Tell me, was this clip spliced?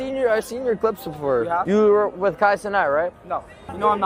no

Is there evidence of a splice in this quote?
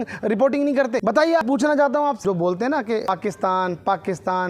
yes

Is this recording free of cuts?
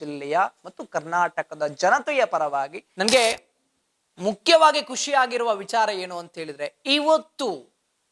no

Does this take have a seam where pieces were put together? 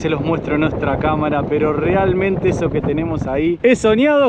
no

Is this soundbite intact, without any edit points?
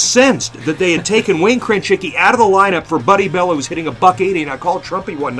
yes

